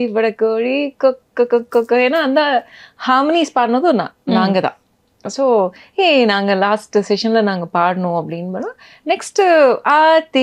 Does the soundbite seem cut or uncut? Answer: uncut